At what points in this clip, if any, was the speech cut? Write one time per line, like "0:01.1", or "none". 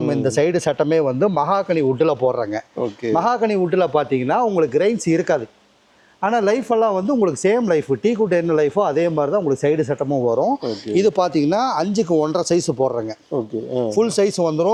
none